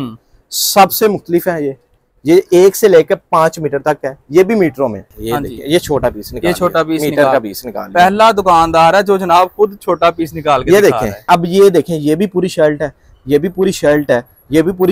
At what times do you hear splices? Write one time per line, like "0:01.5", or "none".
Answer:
0:05.1
0:11.2